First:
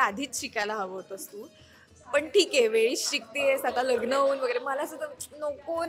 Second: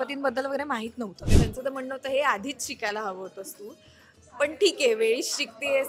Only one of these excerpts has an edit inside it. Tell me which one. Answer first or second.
second